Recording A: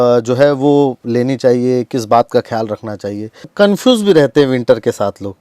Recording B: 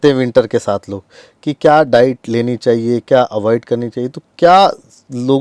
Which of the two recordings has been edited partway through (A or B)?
A